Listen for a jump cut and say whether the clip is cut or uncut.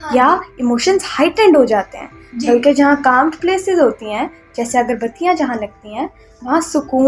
uncut